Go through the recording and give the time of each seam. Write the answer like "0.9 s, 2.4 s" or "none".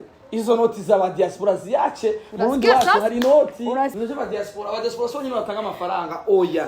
4.0 s